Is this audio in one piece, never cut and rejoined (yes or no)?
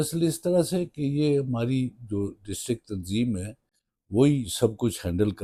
yes